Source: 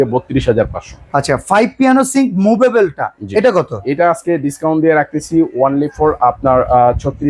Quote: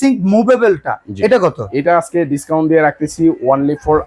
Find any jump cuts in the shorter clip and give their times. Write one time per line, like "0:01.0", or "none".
none